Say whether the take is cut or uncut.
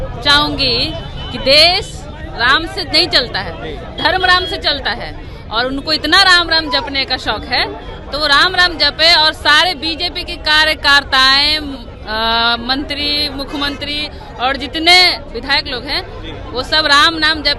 uncut